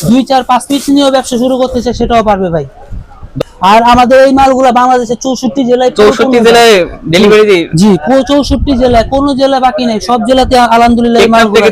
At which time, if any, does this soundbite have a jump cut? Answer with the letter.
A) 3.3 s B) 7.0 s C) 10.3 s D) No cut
A